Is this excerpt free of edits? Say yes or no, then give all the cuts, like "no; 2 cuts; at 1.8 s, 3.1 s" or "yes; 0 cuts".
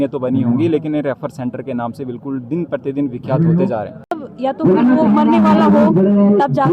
no; 1 cut; at 4.3 s